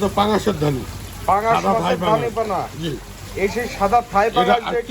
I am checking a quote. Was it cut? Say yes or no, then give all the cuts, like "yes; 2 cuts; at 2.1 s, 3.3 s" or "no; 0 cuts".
no; 0 cuts